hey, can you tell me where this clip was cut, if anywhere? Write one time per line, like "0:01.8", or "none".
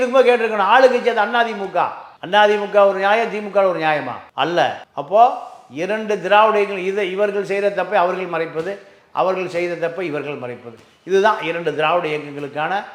none